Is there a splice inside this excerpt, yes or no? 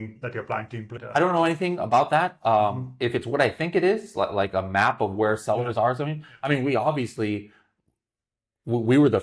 yes